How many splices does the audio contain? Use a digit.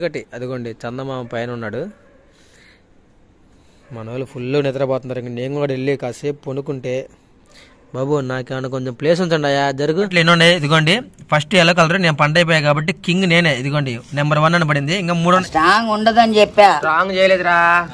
2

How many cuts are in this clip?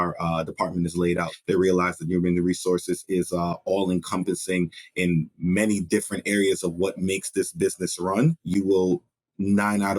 2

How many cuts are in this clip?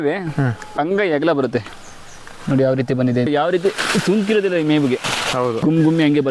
3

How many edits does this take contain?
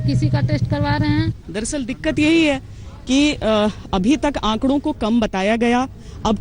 1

